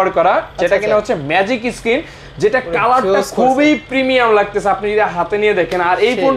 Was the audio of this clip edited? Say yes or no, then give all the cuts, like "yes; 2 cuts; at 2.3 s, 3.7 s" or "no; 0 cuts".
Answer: no; 0 cuts